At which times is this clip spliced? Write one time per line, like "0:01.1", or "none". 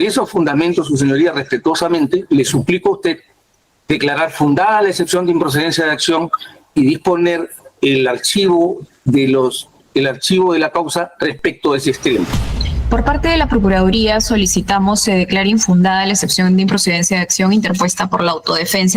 0:12.4